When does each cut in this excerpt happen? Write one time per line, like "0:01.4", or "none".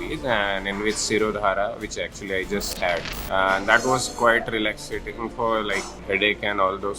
0:03.1
0:05.9